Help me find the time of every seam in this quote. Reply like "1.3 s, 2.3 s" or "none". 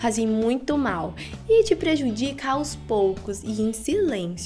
none